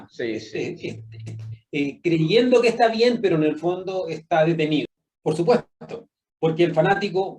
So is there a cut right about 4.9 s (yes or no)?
yes